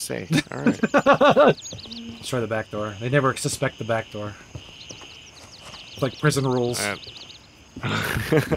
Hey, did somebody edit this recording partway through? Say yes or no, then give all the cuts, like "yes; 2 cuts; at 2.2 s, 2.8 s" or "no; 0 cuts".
yes; 1 cut; at 1.7 s